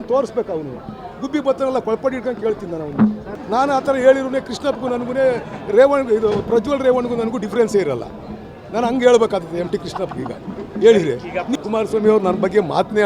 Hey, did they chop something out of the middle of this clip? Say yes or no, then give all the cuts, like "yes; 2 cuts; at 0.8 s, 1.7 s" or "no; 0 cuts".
yes; 2 cuts; at 3.3 s, 11.5 s